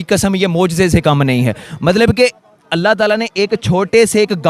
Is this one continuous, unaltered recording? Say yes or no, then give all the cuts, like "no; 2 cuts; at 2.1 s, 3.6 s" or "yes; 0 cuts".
yes; 0 cuts